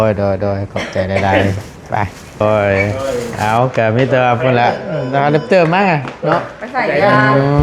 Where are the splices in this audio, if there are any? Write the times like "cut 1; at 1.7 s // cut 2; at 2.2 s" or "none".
cut 1; at 2.4 s